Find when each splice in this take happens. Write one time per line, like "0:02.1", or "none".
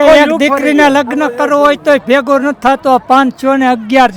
none